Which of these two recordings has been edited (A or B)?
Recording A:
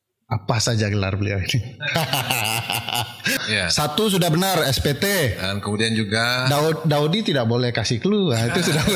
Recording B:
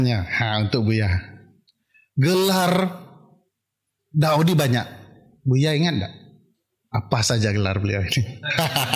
A